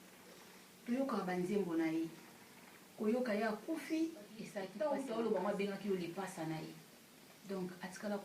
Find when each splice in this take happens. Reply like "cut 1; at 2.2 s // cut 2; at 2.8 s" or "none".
cut 1; at 4.6 s